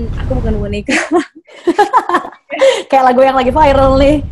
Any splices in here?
no; 0 cuts

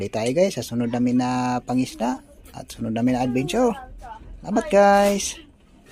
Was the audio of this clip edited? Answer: no; 0 cuts

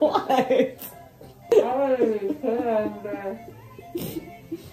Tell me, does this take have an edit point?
yes; 1 cut; at 1.5 s

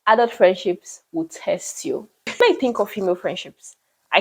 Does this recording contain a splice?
yes; 1 cut; at 2.4 s

